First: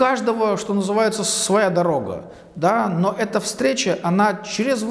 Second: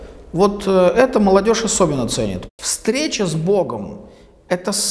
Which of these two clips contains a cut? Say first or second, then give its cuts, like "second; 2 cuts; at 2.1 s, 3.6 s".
second; 1 cut; at 2.4 s